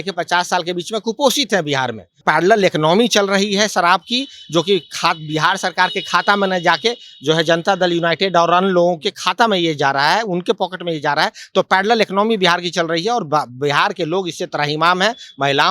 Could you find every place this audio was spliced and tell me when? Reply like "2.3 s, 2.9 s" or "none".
2.2 s